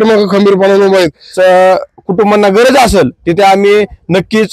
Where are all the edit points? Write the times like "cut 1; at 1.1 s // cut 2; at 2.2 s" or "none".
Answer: cut 1; at 1.2 s